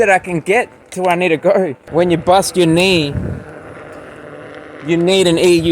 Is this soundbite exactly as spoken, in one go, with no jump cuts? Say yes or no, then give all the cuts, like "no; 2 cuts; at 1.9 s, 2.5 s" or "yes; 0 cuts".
no; 1 cut; at 1.8 s